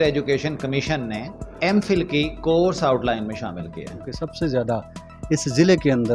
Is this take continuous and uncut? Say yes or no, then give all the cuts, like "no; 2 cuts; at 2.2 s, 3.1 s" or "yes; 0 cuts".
no; 2 cuts; at 1.4 s, 4.0 s